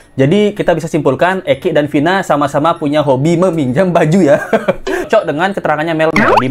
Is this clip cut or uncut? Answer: cut